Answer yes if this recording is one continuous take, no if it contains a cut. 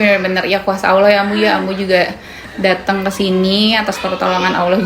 yes